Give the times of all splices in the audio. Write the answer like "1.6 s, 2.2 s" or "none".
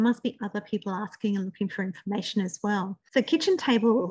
3.0 s